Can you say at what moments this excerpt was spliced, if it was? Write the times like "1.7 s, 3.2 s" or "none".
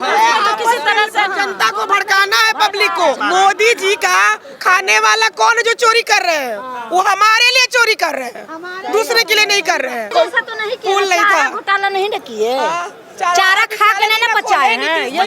3.2 s, 10.1 s